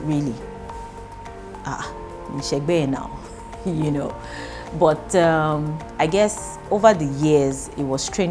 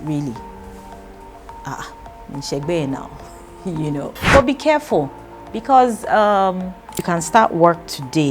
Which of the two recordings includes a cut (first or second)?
second